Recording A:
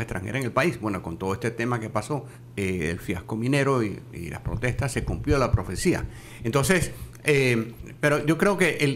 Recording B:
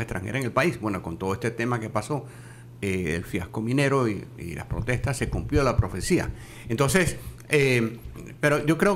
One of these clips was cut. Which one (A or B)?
A